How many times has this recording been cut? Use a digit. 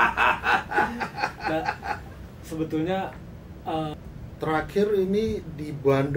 1